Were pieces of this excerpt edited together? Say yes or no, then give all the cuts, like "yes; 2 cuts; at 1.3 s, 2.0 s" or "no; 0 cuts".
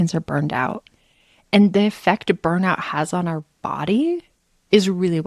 no; 0 cuts